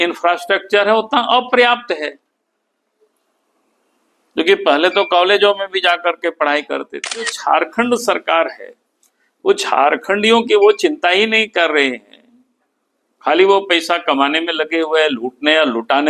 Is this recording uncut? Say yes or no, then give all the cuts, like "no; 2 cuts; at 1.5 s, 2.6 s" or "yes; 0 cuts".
no; 1 cut; at 7.3 s